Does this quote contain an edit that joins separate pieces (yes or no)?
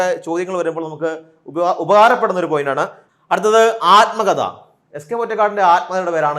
yes